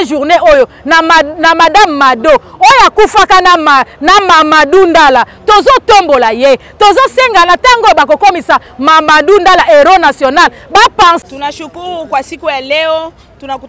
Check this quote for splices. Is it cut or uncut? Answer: cut